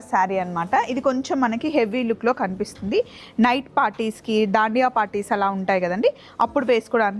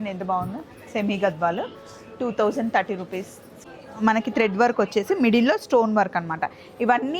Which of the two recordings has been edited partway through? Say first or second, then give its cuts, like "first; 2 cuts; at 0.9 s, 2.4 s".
second; 1 cut; at 3.6 s